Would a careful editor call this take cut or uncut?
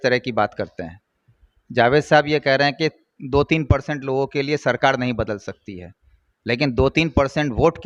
uncut